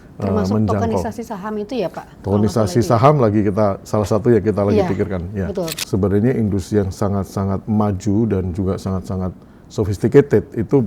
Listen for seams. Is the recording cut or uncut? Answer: cut